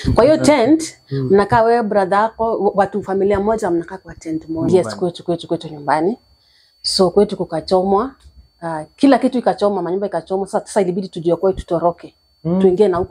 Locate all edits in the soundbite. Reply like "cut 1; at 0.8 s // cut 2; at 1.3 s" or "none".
cut 1; at 4.7 s